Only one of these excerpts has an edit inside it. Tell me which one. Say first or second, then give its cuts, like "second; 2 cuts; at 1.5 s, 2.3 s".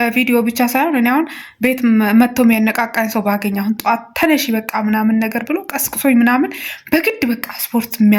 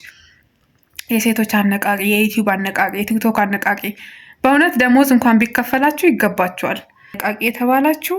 second; 1 cut; at 7.2 s